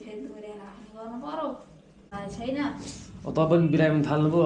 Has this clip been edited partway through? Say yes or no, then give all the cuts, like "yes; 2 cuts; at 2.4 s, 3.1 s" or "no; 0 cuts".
yes; 1 cut; at 2.1 s